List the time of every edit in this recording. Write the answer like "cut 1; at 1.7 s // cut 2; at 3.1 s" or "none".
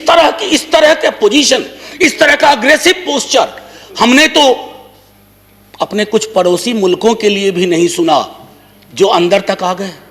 none